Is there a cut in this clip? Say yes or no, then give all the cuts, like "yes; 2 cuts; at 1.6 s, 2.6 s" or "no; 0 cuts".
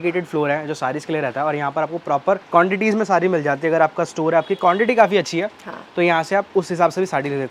no; 0 cuts